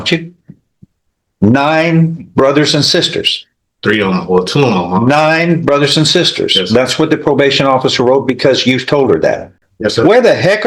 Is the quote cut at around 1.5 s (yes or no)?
no